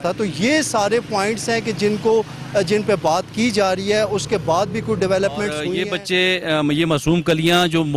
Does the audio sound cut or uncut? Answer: cut